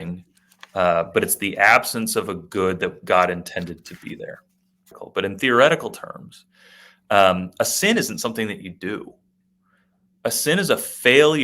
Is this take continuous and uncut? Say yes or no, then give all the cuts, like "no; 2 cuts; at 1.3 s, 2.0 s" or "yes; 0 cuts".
no; 1 cut; at 5.0 s